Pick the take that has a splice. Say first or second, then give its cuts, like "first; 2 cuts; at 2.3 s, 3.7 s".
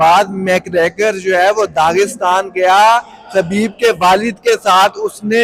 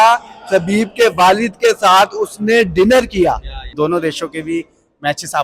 second; 1 cut; at 3.6 s